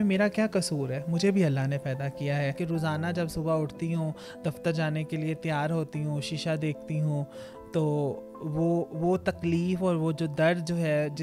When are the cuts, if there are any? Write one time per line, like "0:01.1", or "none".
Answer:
0:02.6